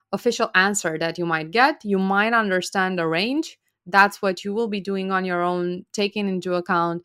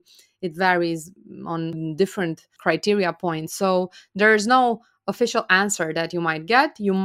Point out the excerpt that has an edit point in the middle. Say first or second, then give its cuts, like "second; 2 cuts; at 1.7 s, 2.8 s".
second; 2 cuts; at 1.8 s, 2.5 s